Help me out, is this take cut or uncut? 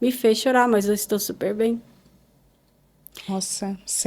uncut